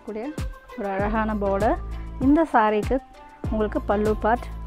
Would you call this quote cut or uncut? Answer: uncut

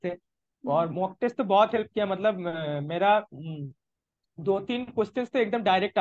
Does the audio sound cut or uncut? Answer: uncut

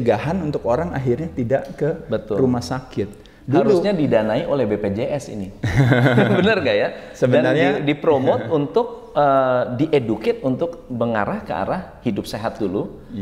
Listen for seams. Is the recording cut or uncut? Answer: uncut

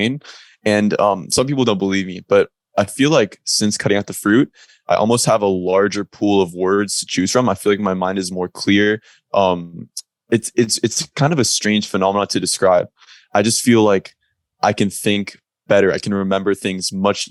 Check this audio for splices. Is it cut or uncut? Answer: uncut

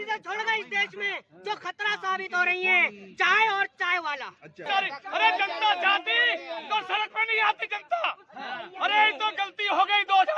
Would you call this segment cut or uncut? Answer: cut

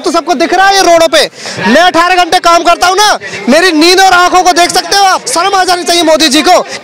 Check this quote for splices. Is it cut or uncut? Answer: cut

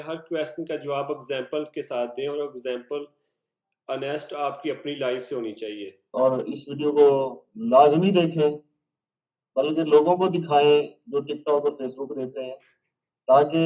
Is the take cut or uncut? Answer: cut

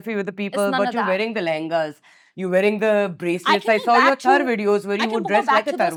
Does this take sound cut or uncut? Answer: uncut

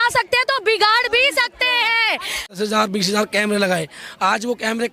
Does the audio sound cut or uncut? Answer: cut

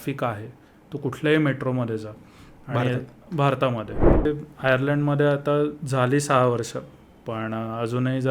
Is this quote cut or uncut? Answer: cut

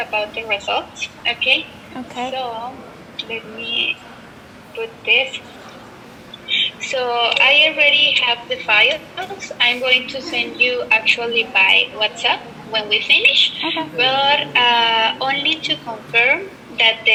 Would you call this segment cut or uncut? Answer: uncut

